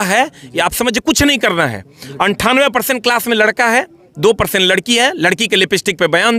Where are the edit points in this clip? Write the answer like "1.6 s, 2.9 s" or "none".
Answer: none